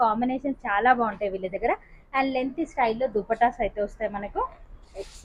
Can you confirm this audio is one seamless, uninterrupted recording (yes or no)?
yes